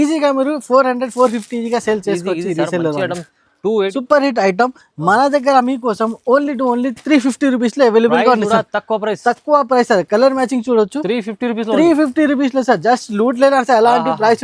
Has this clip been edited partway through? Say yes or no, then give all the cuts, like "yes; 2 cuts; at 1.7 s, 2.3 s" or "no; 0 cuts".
yes; 1 cut; at 3.9 s